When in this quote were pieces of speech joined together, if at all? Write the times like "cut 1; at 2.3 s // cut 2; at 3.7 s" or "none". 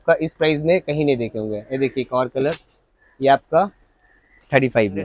none